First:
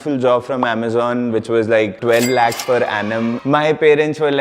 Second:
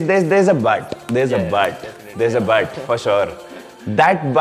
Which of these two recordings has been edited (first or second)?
first